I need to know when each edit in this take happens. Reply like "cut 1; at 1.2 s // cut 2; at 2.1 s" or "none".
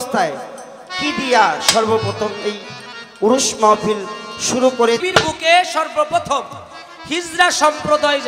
cut 1; at 5.0 s